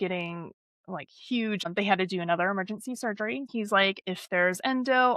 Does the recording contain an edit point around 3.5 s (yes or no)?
yes